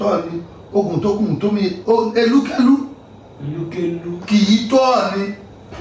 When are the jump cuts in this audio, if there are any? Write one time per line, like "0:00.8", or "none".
none